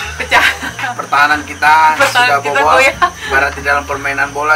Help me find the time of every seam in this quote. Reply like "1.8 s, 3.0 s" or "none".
0.9 s, 3.2 s